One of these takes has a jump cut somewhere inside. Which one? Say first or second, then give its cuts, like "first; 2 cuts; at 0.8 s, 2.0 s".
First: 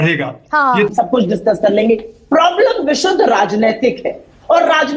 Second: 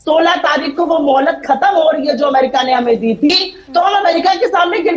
first; 1 cut; at 0.9 s